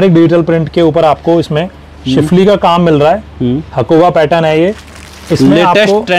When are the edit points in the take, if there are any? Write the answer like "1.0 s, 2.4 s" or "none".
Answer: none